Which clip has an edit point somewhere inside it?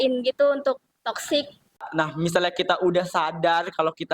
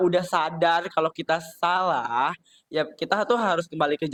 first; 1 cut; at 1.9 s

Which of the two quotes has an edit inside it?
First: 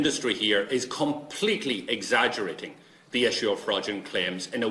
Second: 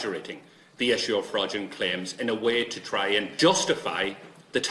second; 1 cut; at 3.3 s

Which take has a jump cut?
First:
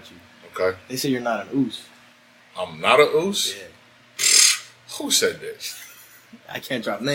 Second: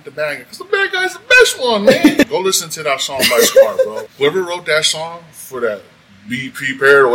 second; 2 cuts; at 2.3 s, 4.0 s

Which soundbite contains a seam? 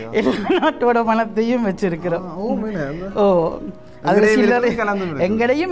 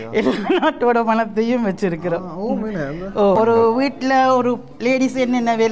second; 1 cut; at 3.3 s

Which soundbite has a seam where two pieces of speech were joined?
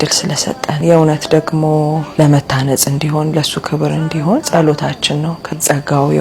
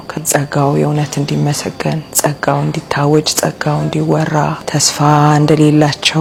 first; 2 cuts; at 2.1 s, 4.5 s

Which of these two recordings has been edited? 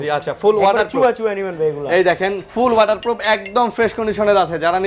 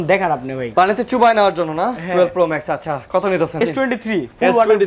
second; 1 cut; at 3.6 s

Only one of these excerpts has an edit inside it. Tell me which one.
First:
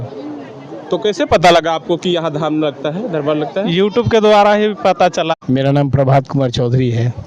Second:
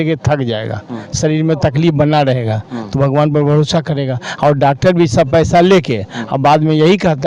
first; 1 cut; at 5.4 s

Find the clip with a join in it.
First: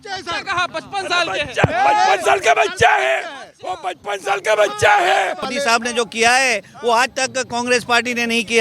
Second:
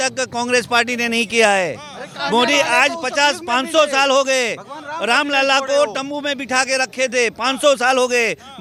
first; 1 cut; at 5.5 s

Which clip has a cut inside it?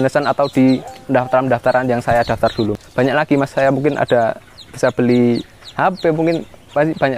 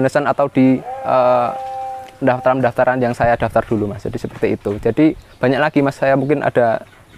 first; 2 cuts; at 0.9 s, 2.8 s

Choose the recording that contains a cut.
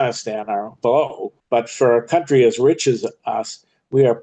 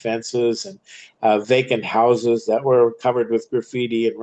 first; 1 cut; at 1.1 s

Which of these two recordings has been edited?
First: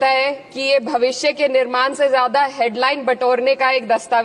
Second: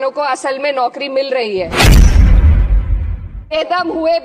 second; 2 cuts; at 1.7 s, 3.5 s

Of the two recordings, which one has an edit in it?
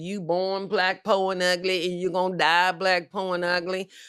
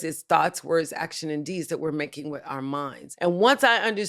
second; 1 cut; at 3.0 s

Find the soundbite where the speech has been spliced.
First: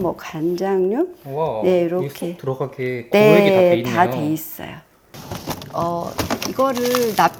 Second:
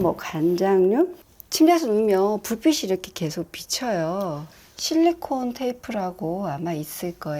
second; 2 cuts; at 1.2 s, 4.5 s

